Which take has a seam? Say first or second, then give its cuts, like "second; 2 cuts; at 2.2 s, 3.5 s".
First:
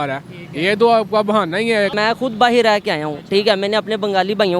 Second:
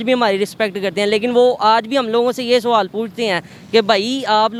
first; 1 cut; at 1.9 s